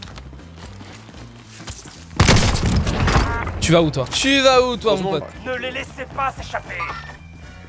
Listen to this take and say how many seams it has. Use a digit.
1